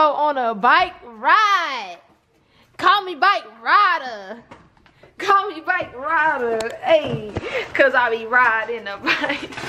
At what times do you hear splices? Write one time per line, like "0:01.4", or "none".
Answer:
none